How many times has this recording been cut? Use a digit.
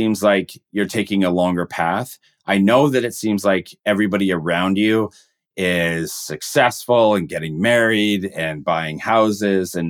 0